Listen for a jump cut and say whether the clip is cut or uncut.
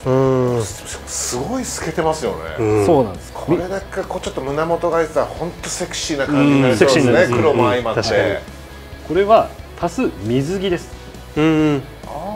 cut